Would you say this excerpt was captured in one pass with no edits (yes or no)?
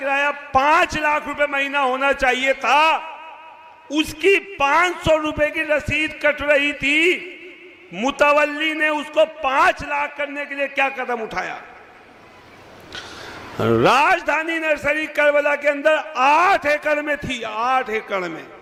yes